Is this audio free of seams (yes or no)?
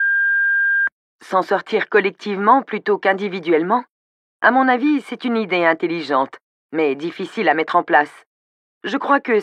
no